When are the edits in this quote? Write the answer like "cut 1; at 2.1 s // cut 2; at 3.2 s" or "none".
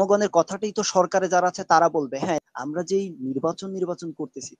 cut 1; at 2.4 s